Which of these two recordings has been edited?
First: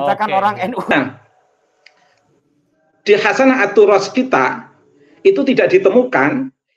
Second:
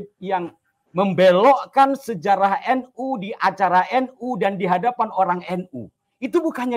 first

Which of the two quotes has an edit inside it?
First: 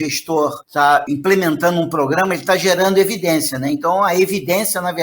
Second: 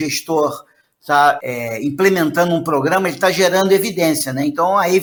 first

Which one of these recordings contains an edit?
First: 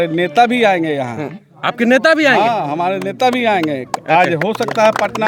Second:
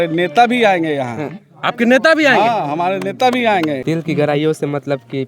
second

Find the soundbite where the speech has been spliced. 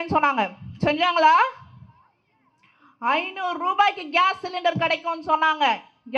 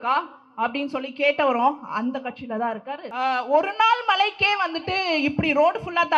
second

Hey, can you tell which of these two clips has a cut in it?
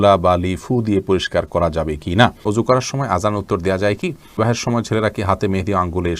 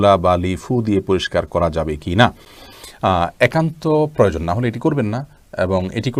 first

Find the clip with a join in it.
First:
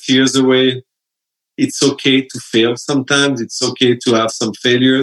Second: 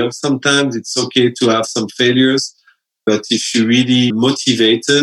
second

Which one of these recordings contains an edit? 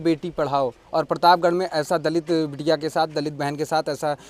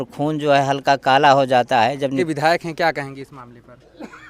second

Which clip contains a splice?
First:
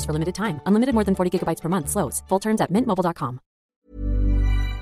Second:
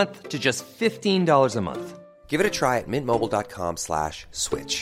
first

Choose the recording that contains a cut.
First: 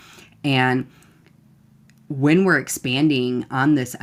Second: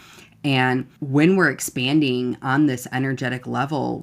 second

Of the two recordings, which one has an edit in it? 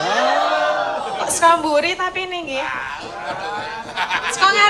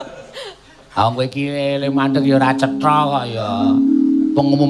first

